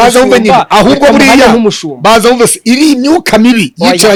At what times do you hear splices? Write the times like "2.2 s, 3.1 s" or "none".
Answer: none

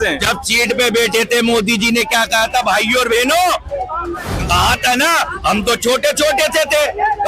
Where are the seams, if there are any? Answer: 4.3 s

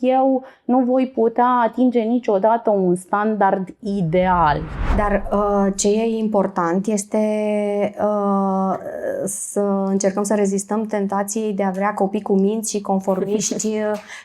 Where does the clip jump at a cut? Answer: 4.8 s

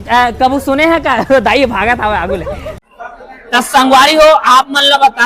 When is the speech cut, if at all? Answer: 2.7 s

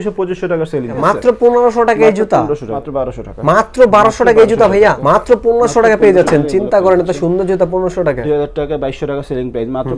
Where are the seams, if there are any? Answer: 1.0 s, 2.7 s, 5.0 s, 8.2 s

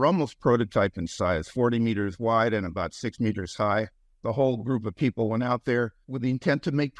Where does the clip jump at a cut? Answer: 4.0 s, 6.0 s

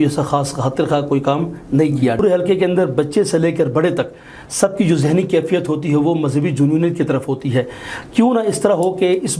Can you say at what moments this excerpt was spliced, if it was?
2.2 s

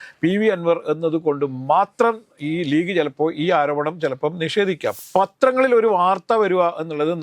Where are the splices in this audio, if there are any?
4.9 s

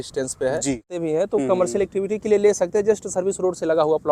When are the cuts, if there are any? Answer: 1.0 s

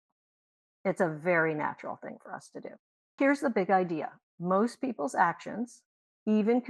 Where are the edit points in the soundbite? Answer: 3.2 s

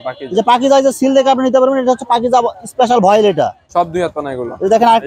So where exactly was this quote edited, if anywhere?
3.6 s

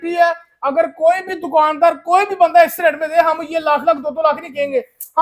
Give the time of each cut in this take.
none

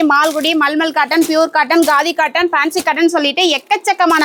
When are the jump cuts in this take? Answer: none

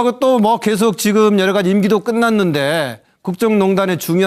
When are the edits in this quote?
3.0 s

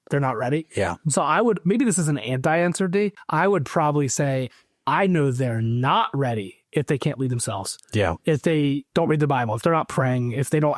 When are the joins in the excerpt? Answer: 3.2 s

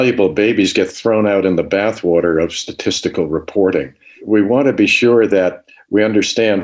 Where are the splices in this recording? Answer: 4.2 s

